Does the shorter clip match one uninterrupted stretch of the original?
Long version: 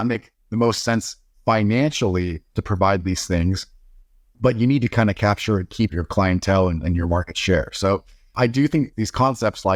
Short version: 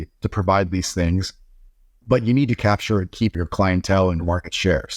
no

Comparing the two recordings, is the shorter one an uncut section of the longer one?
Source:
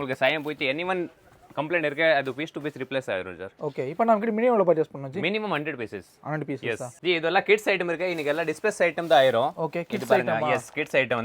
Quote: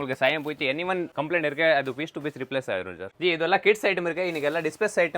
no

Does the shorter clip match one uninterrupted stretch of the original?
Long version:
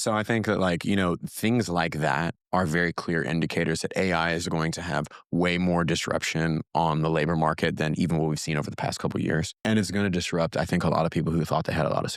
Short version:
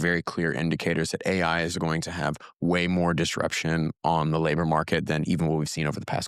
yes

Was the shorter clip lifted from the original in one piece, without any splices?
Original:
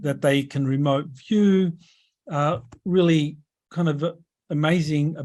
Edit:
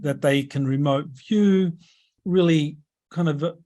no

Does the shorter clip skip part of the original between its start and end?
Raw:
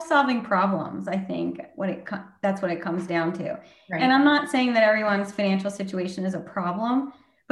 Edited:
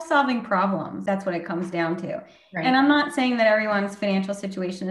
yes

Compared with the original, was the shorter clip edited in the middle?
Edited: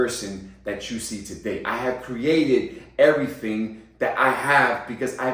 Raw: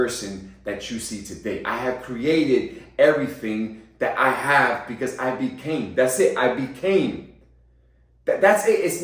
no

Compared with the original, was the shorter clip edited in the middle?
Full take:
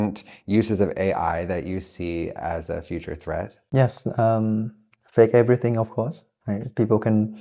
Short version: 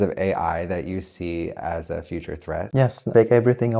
yes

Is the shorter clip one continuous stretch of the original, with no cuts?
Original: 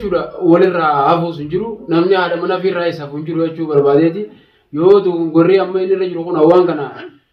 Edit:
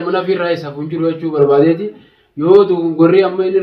yes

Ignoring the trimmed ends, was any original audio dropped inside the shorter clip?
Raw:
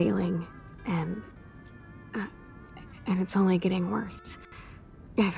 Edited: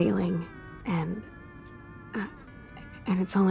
no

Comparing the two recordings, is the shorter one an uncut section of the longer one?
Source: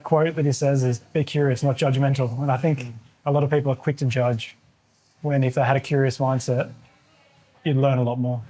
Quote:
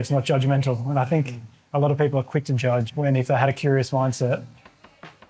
no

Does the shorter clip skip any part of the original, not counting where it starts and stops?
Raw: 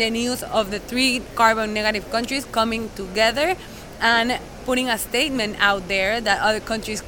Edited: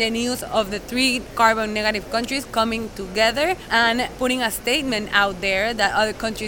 yes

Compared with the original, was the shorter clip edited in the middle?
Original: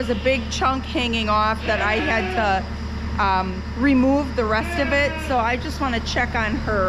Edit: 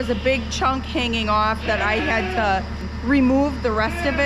yes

